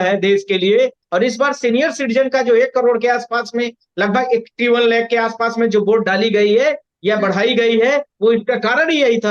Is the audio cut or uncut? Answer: cut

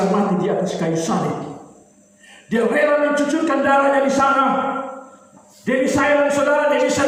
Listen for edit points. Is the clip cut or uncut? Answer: uncut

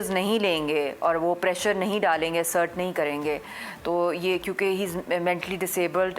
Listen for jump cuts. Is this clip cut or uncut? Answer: uncut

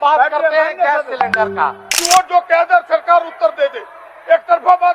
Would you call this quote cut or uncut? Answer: cut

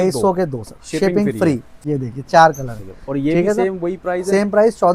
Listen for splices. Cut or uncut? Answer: cut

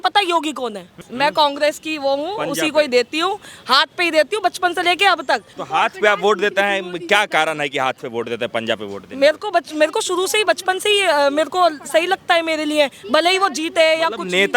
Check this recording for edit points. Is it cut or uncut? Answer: cut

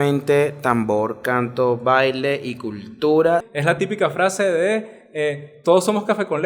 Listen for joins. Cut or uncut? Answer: cut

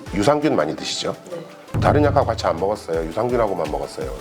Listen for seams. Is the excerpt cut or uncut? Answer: uncut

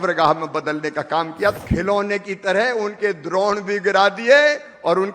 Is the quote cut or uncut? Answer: cut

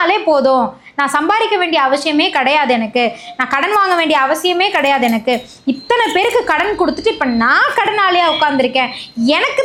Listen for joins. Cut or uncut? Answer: uncut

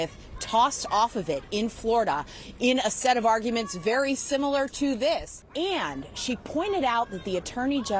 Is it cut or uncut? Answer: cut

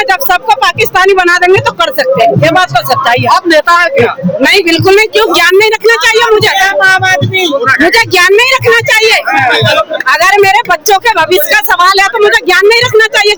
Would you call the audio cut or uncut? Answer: uncut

